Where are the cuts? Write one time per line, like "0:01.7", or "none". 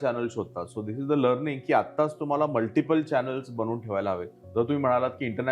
0:04.4

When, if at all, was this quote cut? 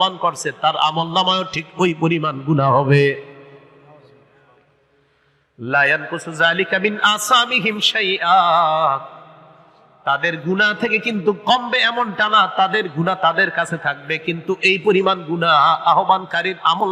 none

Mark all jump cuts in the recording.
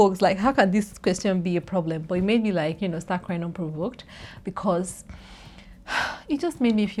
none

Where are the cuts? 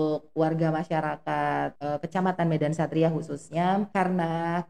0:01.8
0:03.9

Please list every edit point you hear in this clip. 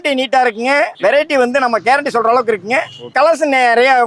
0:00.9
0:03.1

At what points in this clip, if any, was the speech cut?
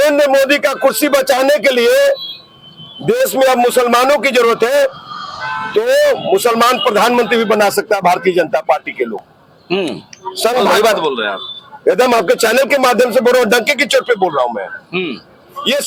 none

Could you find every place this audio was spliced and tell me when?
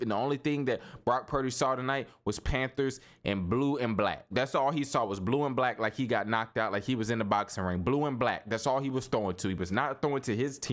none

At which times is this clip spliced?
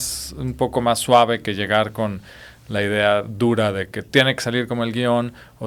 none

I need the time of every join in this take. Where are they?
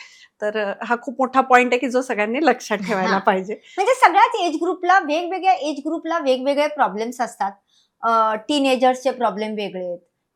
none

